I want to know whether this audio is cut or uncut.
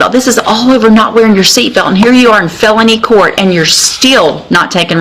uncut